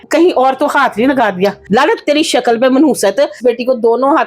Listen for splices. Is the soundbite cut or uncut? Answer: cut